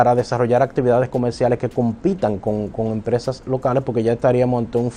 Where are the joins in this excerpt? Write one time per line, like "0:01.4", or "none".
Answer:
none